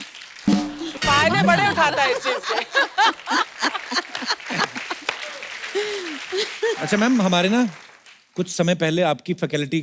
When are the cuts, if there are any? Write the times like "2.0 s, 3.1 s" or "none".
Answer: 6.8 s